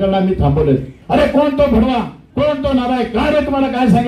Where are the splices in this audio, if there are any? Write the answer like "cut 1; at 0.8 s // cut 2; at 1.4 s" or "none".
cut 1; at 0.9 s